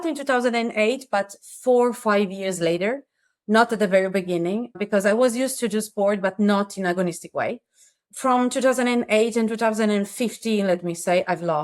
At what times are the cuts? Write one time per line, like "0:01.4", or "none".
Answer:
0:04.8
0:08.0